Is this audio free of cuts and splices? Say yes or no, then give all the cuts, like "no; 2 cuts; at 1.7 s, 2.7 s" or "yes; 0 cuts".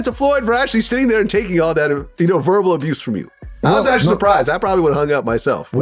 yes; 0 cuts